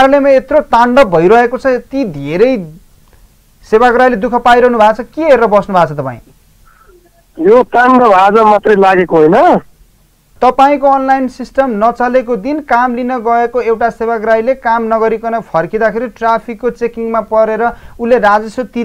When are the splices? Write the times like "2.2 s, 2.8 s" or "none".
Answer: 10.3 s